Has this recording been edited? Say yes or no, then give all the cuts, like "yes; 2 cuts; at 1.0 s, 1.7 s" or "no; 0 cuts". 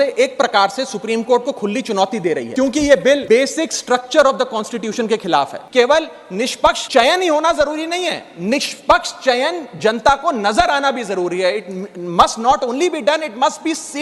yes; 4 cuts; at 2.5 s, 3.2 s, 5.6 s, 6.8 s